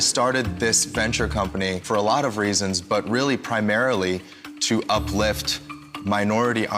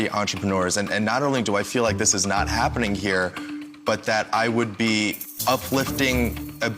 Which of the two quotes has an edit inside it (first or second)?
second